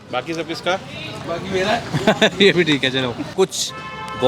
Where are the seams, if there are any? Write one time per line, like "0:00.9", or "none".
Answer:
0:03.3